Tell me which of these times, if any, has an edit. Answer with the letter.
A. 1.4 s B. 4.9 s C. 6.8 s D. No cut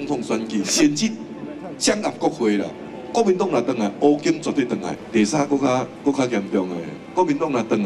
B